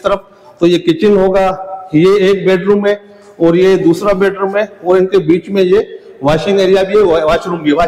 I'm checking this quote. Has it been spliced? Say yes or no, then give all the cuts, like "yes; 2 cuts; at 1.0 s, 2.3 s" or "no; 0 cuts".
no; 0 cuts